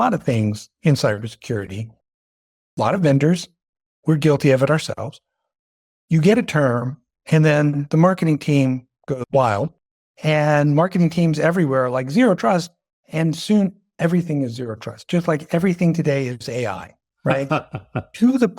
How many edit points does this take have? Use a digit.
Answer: 1